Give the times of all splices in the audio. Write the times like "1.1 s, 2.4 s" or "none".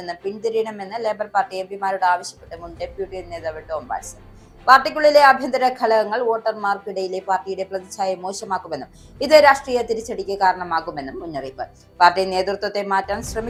none

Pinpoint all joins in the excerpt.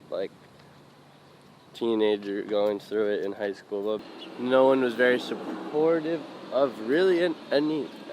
4.1 s

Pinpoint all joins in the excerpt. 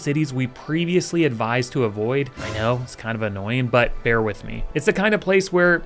2.4 s, 4.5 s

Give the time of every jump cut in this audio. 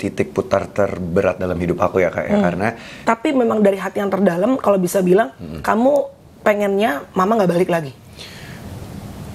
3.1 s

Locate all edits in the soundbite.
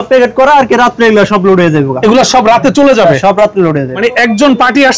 3.9 s

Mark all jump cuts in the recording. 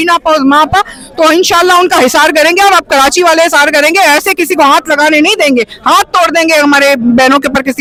none

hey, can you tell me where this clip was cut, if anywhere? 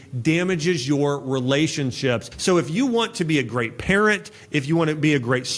2.3 s

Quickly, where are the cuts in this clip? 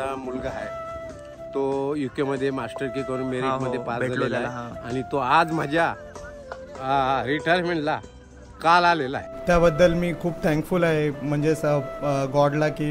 9.3 s

